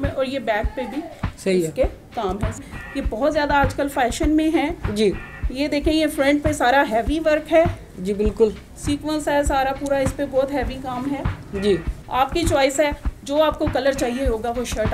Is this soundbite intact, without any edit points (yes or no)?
no